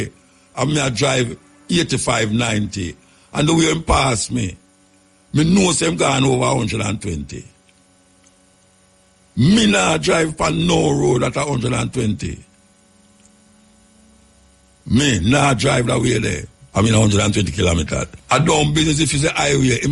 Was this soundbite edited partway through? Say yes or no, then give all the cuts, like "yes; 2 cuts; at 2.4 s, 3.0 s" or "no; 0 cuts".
yes; 2 cuts; at 16.5 s, 18.2 s